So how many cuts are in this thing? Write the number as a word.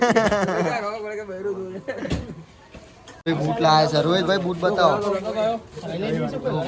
one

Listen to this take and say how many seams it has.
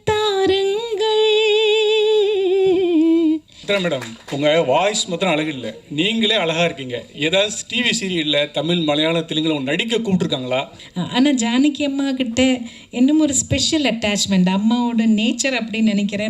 two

